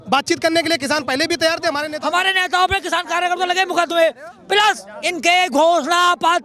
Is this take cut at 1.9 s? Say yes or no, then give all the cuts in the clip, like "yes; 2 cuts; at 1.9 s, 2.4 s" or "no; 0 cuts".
yes; 1 cut; at 1.9 s